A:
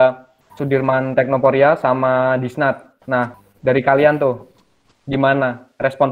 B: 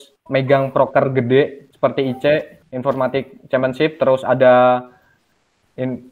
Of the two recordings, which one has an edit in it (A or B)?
B